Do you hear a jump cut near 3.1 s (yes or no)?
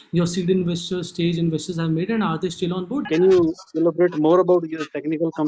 yes